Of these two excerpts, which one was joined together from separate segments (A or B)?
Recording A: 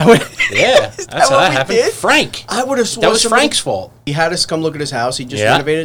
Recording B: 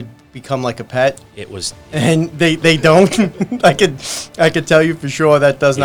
A